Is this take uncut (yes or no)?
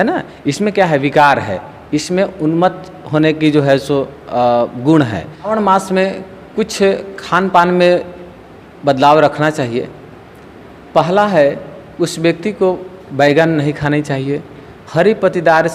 no